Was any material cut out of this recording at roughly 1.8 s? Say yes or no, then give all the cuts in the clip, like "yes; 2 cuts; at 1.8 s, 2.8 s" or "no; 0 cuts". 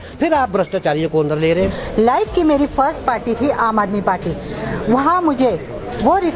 yes; 1 cut; at 1.8 s